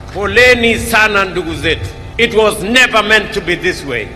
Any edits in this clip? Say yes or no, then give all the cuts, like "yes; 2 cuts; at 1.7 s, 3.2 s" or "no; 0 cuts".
yes; 1 cut; at 2.0 s